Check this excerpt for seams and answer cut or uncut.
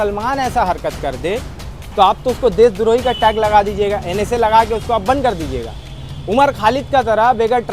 uncut